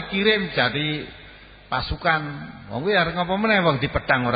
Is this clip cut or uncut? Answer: uncut